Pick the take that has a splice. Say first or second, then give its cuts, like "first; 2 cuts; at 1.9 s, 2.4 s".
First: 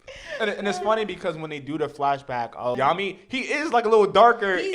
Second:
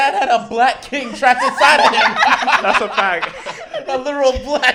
first; 1 cut; at 2.8 s